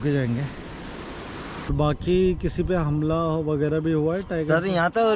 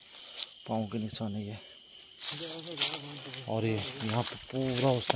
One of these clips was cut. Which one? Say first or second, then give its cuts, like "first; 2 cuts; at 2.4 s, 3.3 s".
first; 1 cut; at 1.7 s